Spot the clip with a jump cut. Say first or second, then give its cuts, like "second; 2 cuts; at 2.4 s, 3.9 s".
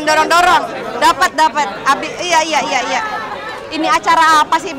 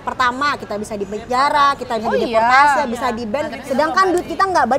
second; 1 cut; at 3.5 s